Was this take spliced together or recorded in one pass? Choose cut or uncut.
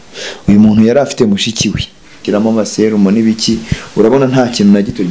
cut